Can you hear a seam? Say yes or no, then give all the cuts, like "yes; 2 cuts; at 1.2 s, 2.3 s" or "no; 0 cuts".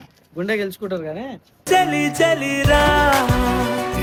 no; 0 cuts